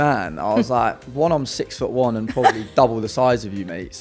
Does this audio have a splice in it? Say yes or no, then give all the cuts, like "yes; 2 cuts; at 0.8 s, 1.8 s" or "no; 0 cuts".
no; 0 cuts